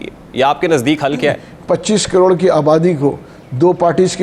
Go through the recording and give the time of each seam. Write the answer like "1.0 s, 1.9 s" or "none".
1.5 s